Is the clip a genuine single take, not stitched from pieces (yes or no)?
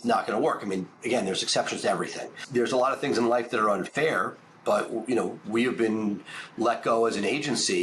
no